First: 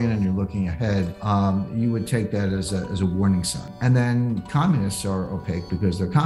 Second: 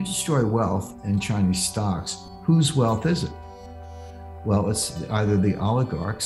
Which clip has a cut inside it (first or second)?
first